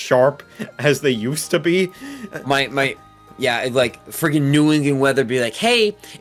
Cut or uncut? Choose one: uncut